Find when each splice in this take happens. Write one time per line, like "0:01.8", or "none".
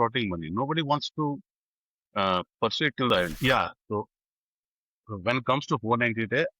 0:03.3